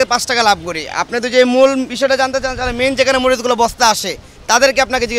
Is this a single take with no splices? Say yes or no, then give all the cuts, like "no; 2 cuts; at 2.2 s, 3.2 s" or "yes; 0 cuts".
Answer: yes; 0 cuts